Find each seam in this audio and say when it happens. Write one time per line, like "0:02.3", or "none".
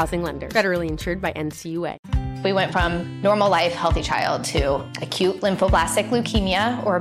0:02.1